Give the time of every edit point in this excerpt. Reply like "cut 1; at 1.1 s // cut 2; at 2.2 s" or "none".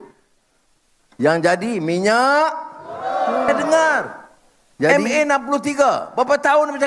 cut 1; at 3.6 s